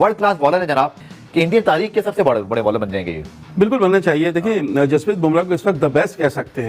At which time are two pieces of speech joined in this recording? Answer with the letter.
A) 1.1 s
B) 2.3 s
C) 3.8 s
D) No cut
A